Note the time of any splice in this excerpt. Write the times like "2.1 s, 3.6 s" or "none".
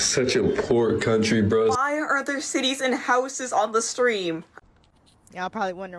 4.5 s